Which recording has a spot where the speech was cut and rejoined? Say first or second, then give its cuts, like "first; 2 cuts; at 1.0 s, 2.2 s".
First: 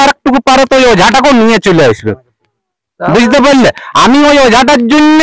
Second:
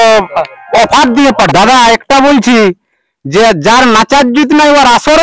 second; 1 cut; at 1.4 s